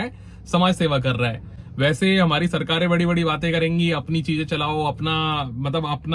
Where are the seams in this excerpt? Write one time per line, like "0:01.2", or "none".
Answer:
none